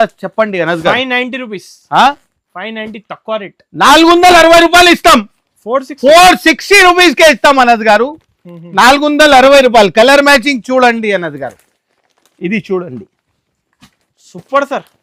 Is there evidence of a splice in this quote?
no; 0 cuts

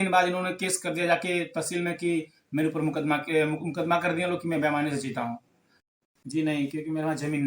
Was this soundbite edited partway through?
yes; 1 cut; at 5.9 s

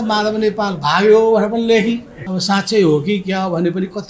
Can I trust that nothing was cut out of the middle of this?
no; 1 cut; at 2.1 s

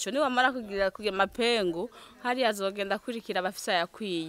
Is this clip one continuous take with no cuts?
yes; 0 cuts

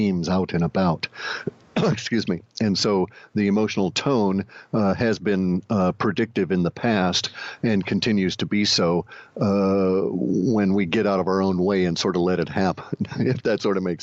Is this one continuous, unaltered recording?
no; 1 cut; at 10.1 s

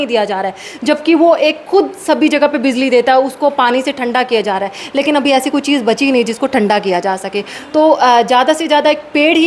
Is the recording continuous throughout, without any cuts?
yes; 0 cuts

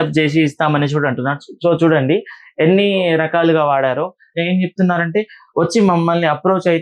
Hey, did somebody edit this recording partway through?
yes; 1 cut; at 4.4 s

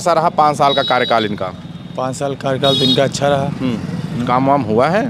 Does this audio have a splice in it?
no; 0 cuts

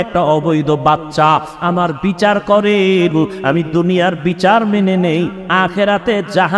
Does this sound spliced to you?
no; 0 cuts

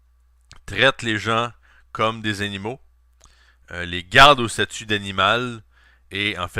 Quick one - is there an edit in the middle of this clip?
no; 0 cuts

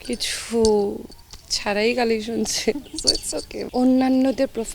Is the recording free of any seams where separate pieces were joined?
no; 1 cut; at 3.6 s

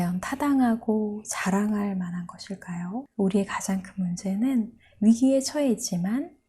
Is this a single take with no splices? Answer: no; 1 cut; at 3.0 s

